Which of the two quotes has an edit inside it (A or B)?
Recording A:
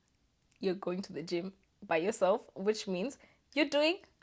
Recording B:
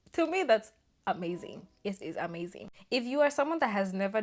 B